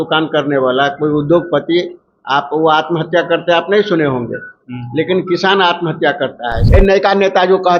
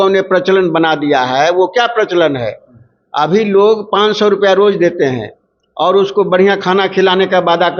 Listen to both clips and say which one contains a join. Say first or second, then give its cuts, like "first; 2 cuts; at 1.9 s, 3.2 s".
first; 1 cut; at 6.6 s